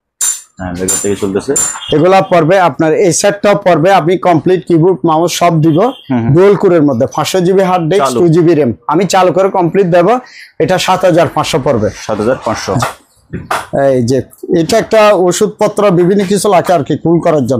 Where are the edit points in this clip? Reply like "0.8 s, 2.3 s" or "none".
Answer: 1.7 s, 12.8 s